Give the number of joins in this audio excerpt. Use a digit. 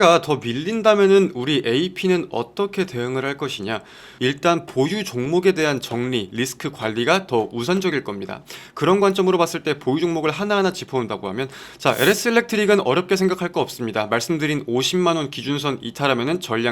1